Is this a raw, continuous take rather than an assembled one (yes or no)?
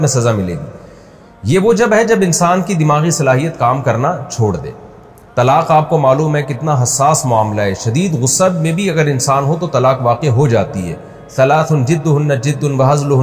yes